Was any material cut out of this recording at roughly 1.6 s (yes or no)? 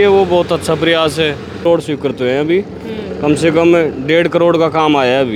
yes